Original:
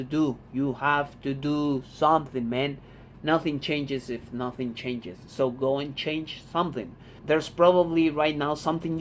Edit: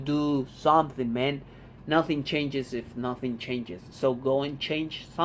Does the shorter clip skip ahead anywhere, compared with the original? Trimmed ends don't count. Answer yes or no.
no